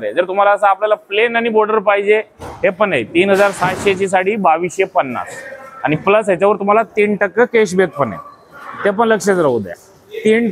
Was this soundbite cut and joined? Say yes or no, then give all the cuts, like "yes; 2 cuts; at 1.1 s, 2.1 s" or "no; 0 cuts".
no; 0 cuts